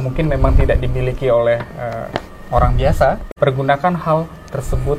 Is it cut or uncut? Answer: cut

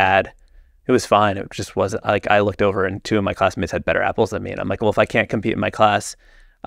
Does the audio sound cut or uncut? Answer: uncut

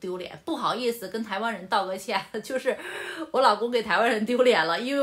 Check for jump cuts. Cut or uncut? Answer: uncut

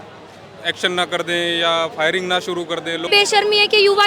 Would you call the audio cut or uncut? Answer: cut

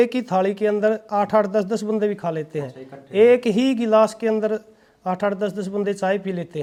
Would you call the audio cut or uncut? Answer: uncut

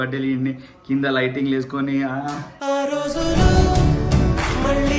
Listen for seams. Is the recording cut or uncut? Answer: uncut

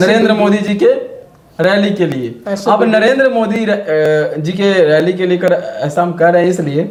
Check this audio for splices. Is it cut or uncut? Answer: uncut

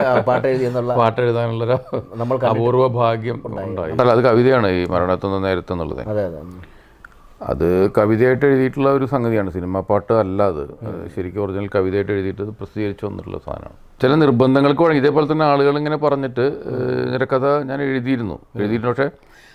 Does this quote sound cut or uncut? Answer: cut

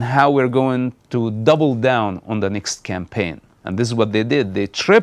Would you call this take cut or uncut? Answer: uncut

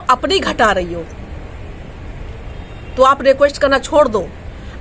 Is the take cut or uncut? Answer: uncut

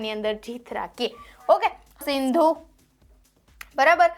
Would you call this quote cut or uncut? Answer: cut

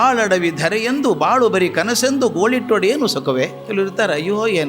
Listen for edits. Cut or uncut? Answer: cut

